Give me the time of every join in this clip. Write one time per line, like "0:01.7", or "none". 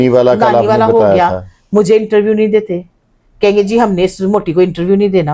none

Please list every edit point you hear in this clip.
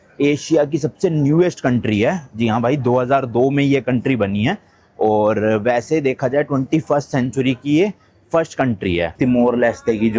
0:09.1

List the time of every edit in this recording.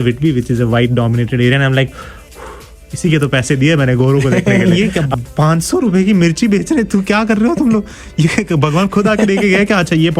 0:04.7

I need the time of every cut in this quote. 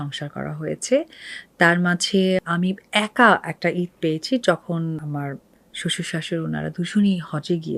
0:02.5
0:05.0

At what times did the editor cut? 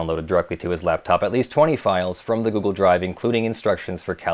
none

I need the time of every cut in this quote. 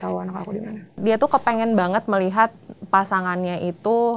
0:00.9

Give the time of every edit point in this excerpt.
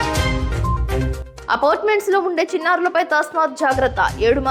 0:01.2

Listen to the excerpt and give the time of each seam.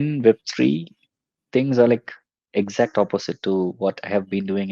none

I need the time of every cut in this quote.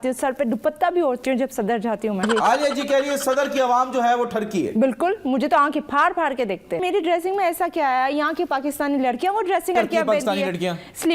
0:02.2
0:06.8
0:09.7

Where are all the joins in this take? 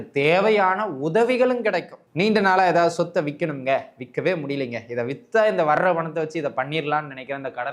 0:02.0

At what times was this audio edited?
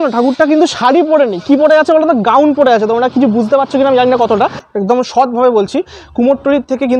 0:04.6

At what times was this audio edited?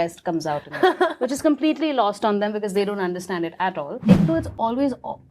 0:04.0

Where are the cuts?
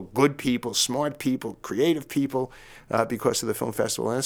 none

